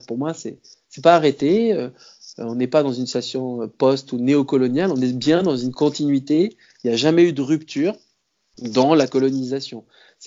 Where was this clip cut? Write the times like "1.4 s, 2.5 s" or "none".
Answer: none